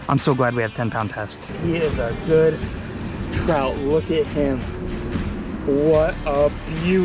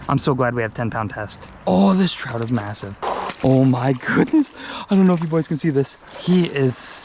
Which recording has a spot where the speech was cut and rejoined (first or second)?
first